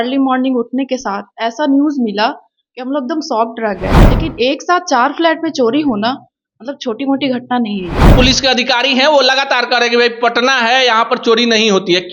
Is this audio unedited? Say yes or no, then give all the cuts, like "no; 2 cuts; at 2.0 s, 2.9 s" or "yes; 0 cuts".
no; 2 cuts; at 4.1 s, 8.1 s